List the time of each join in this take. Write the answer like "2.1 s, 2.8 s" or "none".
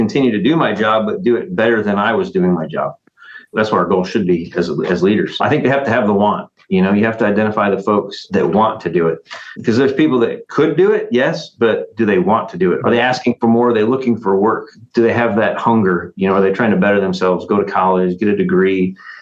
3.5 s, 5.4 s, 8.2 s, 12.8 s, 14.7 s